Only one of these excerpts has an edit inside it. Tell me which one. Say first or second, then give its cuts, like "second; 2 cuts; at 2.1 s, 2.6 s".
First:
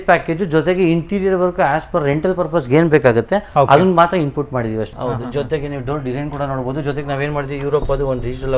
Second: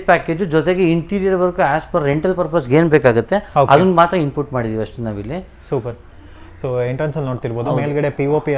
first; 1 cut; at 4.9 s